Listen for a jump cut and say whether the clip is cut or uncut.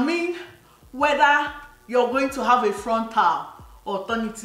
uncut